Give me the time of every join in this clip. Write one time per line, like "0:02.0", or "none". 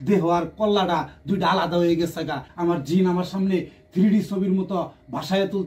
0:02.5